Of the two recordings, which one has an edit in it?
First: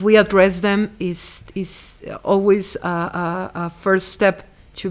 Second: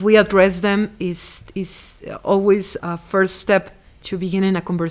second; 1 cut; at 2.7 s

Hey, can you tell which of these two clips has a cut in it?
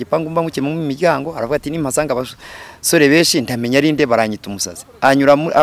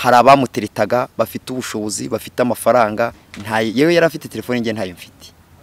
second; 1 cut; at 3.3 s

